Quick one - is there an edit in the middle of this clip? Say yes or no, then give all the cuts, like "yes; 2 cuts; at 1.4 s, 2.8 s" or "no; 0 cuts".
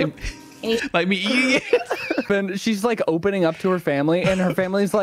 yes; 1 cut; at 2.3 s